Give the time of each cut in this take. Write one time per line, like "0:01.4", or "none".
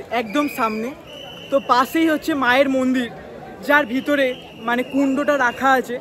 none